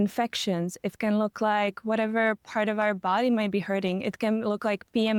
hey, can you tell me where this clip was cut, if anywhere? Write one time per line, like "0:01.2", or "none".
none